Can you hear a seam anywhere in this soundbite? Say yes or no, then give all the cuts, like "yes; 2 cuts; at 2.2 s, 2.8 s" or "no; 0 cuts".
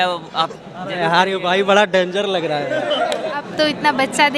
yes; 1 cut; at 3.4 s